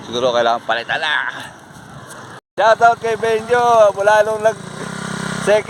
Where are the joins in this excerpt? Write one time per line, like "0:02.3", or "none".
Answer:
0:02.4